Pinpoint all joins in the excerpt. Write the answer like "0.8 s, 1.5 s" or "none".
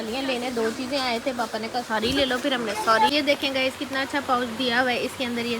3.1 s